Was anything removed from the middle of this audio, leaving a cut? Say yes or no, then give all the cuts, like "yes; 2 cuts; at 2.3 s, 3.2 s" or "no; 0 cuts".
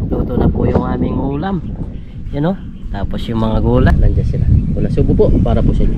yes; 1 cut; at 3.8 s